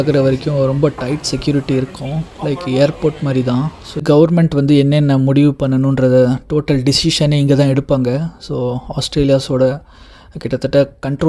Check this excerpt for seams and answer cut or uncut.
cut